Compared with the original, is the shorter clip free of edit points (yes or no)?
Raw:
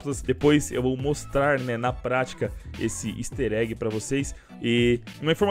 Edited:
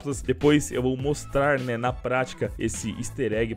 no